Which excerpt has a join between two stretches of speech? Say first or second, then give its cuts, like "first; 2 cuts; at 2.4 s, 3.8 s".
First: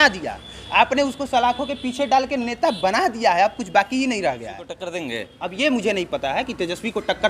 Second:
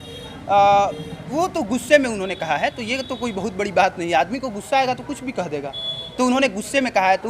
first; 1 cut; at 4.9 s